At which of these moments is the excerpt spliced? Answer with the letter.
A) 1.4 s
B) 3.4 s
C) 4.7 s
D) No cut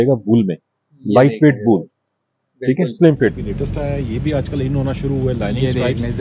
B